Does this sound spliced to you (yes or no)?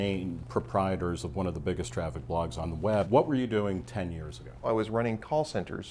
yes